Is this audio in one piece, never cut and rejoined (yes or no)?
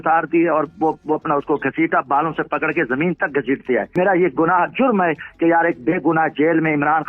no